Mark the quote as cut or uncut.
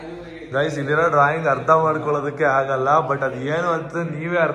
uncut